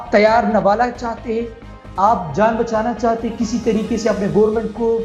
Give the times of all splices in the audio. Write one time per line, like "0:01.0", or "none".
none